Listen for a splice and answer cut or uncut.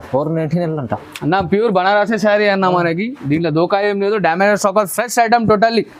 uncut